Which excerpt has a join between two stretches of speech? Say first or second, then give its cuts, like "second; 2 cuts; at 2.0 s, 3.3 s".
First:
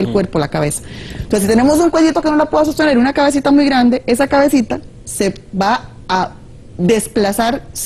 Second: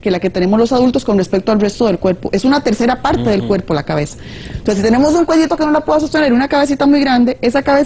second; 1 cut; at 2.0 s